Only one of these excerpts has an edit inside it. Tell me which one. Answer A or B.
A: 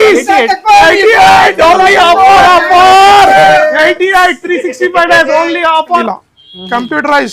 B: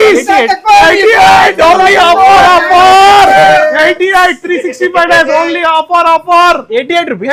A